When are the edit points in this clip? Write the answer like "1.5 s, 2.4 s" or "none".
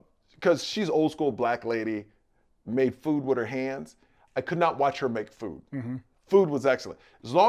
6.1 s